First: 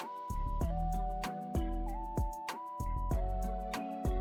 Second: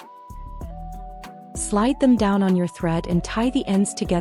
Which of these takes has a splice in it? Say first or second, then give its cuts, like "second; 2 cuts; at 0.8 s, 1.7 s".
second; 1 cut; at 1.7 s